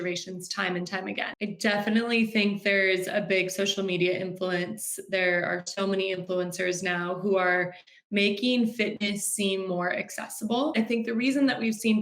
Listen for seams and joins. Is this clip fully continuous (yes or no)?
no